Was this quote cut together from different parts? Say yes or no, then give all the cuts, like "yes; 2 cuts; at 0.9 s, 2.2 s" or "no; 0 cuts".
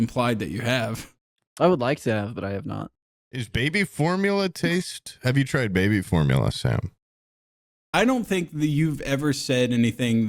yes; 2 cuts; at 3.6 s, 7.3 s